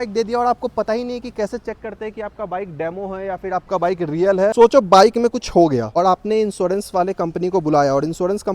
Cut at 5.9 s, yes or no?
yes